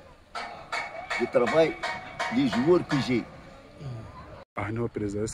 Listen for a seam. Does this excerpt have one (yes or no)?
yes